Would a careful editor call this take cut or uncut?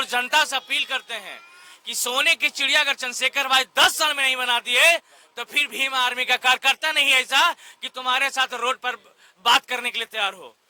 uncut